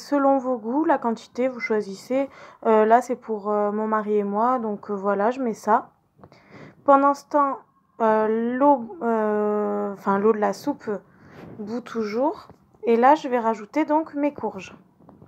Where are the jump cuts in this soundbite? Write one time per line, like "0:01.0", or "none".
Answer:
0:08.7